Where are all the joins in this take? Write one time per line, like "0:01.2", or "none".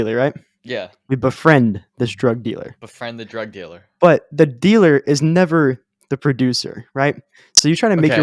0:03.9